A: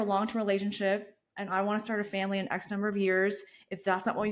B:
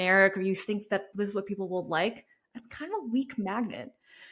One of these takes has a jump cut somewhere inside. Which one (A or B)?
B